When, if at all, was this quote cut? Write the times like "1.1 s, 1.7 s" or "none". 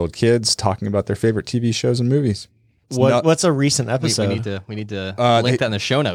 2.8 s